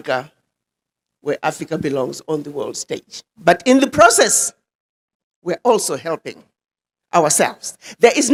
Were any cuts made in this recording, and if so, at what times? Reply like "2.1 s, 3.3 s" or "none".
none